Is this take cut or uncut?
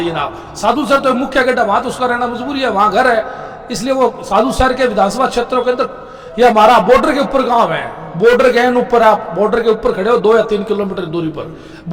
uncut